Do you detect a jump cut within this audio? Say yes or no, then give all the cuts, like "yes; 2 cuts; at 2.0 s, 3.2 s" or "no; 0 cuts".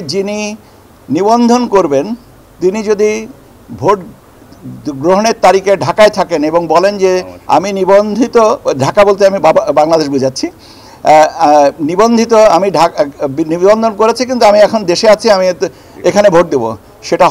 no; 0 cuts